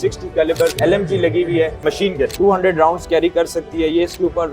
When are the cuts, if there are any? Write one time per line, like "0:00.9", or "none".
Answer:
0:00.8
0:02.3